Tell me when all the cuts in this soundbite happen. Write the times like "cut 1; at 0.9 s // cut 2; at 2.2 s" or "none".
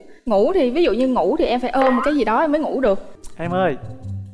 cut 1; at 3.2 s